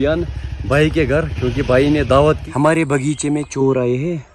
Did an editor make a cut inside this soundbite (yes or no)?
yes